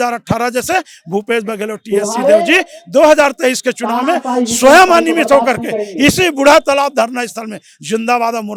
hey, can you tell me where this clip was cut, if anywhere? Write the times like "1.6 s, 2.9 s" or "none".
none